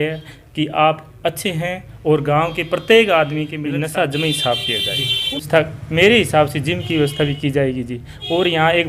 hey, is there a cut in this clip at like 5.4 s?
yes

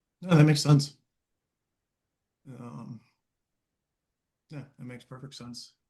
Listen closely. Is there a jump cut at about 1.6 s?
no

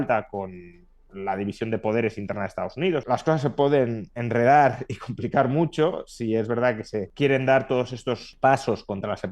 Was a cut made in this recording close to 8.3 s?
yes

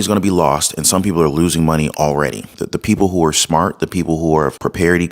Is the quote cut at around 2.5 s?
yes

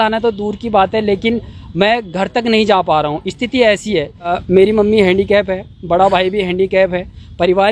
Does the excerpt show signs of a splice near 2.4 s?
no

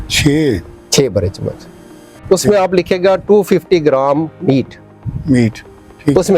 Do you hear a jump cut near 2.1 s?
yes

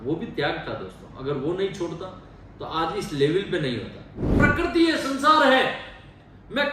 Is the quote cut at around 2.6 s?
no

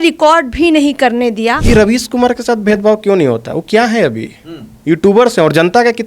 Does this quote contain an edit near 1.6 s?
yes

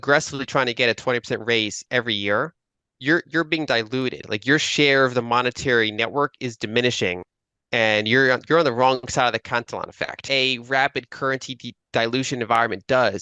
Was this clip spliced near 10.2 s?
yes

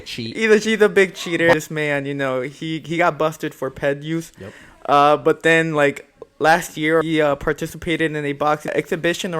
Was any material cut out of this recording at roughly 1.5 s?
yes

